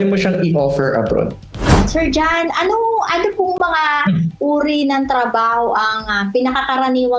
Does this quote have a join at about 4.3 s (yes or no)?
no